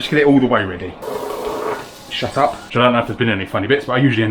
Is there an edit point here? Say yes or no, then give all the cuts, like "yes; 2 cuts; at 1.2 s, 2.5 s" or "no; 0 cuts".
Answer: yes; 2 cuts; at 1.0 s, 2.6 s